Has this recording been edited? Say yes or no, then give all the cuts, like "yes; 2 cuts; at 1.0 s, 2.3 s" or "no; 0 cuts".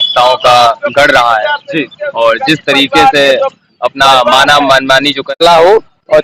yes; 1 cut; at 5.3 s